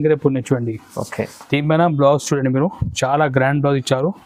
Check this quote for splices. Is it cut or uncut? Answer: uncut